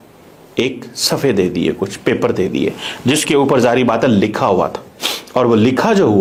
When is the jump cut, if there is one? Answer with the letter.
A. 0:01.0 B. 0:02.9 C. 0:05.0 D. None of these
D